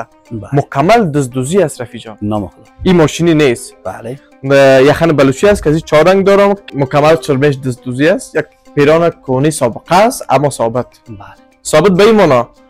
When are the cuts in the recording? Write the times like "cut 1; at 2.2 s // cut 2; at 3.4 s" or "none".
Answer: cut 1; at 6.6 s